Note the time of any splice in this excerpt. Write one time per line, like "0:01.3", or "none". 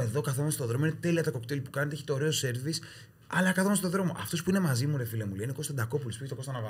none